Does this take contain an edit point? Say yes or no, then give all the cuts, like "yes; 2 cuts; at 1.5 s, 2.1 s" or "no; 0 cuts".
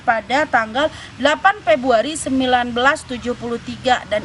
no; 0 cuts